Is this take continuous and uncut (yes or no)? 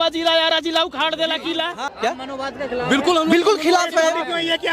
no